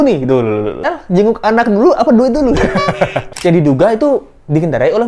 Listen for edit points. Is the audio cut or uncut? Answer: cut